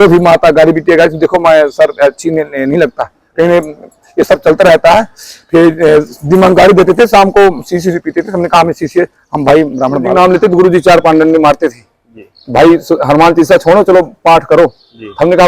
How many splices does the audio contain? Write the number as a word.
one